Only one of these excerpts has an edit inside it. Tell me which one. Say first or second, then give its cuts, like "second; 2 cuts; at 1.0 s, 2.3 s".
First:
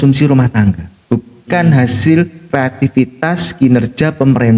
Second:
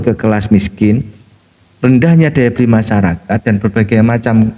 first; 1 cut; at 0.9 s